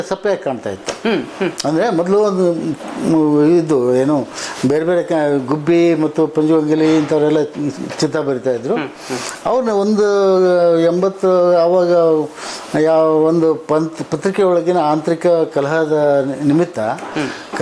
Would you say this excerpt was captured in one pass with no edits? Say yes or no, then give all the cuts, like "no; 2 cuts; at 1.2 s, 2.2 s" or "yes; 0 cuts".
yes; 0 cuts